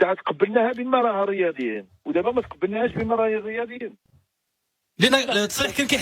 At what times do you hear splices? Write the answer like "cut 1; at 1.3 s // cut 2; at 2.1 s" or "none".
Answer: none

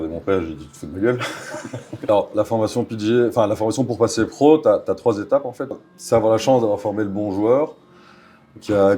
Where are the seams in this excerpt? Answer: cut 1; at 2.1 s // cut 2; at 5.8 s

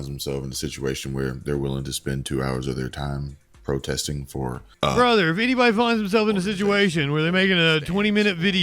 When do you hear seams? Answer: cut 1; at 4.6 s

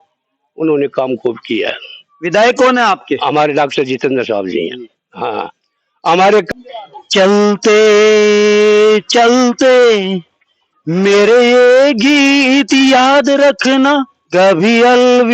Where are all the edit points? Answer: cut 1; at 6.5 s

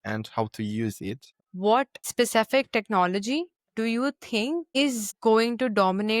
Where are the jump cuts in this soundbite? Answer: cut 1; at 1.4 s

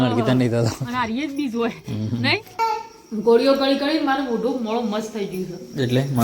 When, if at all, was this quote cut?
cut 1; at 2.6 s

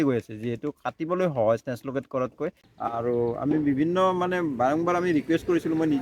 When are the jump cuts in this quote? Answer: cut 1; at 2.6 s

